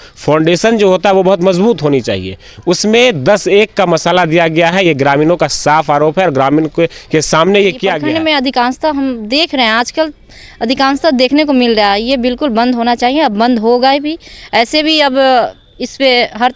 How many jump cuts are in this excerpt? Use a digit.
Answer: 1